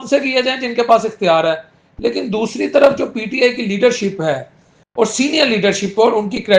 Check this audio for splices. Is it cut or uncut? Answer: uncut